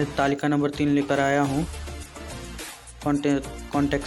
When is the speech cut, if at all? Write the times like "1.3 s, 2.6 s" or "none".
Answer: 1.7 s, 3.0 s